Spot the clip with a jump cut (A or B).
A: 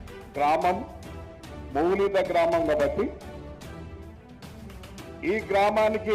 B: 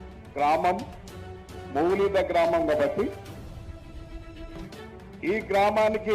B